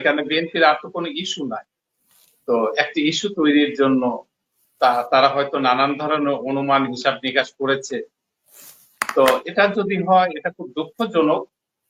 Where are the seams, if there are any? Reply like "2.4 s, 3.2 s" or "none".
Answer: none